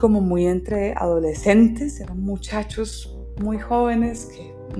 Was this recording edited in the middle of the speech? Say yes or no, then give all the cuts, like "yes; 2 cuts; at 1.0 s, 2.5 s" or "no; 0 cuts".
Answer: yes; 1 cut; at 2.0 s